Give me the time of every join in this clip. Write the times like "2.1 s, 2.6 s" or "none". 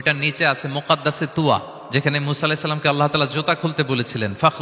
1.8 s